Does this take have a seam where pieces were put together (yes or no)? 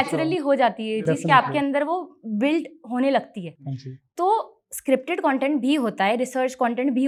no